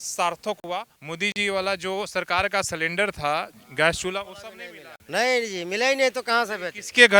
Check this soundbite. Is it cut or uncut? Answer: cut